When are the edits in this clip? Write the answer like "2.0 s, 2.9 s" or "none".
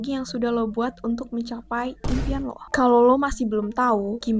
2.6 s